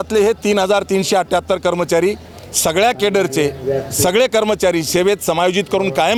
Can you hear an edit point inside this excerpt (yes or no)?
no